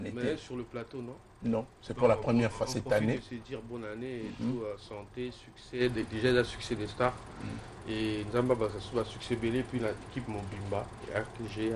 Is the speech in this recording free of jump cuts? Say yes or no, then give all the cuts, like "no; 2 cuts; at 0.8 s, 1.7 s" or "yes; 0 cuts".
yes; 0 cuts